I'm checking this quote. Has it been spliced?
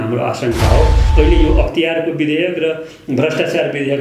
yes; 1 cut; at 1.0 s

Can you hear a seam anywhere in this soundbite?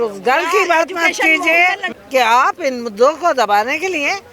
yes; 1 cut; at 1.9 s

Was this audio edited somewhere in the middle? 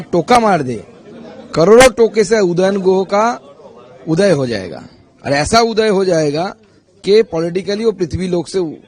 no; 0 cuts

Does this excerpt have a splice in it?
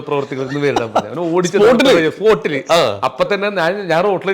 no; 0 cuts

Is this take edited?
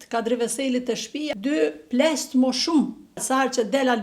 yes; 2 cuts; at 1.3 s, 3.2 s

